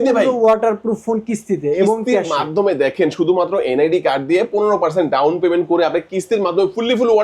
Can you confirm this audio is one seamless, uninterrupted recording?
yes; 0 cuts

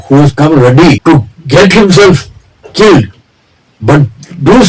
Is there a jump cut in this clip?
yes; 1 cut; at 1.0 s

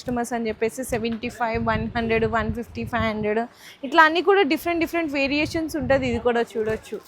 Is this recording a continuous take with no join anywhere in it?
yes; 0 cuts

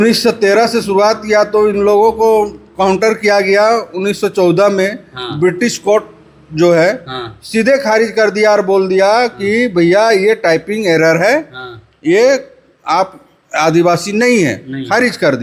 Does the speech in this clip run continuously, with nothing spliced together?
yes; 0 cuts

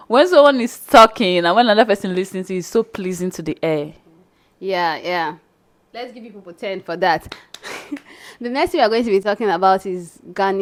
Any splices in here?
no; 0 cuts

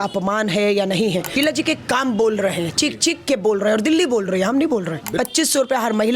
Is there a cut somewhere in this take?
yes; 2 cuts; at 1.3 s, 5.0 s

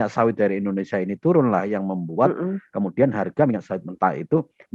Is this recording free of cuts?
yes; 0 cuts

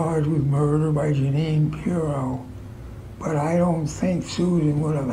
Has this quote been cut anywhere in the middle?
no; 0 cuts

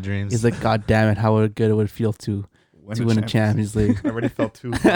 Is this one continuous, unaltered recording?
yes; 0 cuts

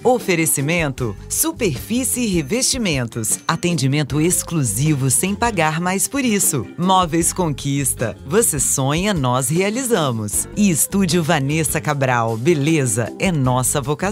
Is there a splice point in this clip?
no; 0 cuts

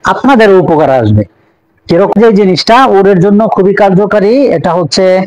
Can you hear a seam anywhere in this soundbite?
yes; 1 cut; at 2.1 s

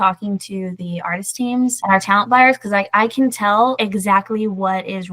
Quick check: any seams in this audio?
yes; 1 cut; at 1.8 s

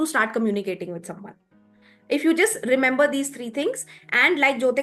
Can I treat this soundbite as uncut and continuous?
yes; 0 cuts

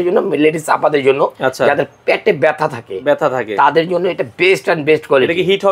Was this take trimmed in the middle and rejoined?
no; 0 cuts

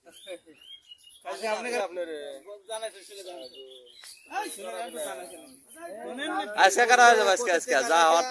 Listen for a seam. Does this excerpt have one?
yes; 1 cut; at 1.8 s

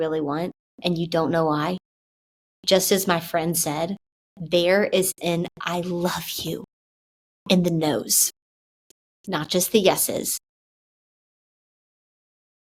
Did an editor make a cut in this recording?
no; 0 cuts

